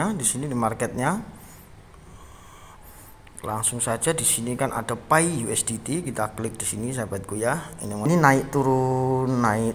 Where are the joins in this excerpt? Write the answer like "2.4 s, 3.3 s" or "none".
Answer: 8.1 s